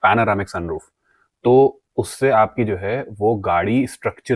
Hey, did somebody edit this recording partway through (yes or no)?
no